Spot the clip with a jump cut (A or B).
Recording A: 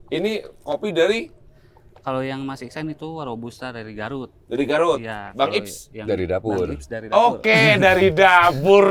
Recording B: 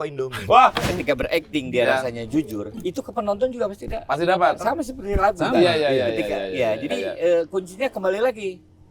B